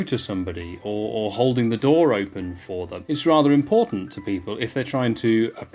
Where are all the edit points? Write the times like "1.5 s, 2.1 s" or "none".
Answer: 2.9 s